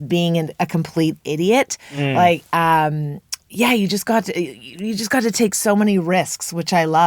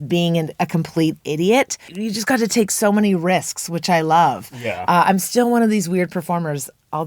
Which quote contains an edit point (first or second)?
second